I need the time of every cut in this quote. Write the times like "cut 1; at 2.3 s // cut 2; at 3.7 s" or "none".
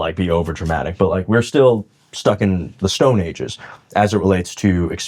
none